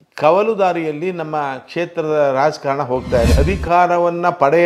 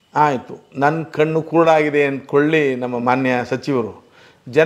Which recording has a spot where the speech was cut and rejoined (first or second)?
first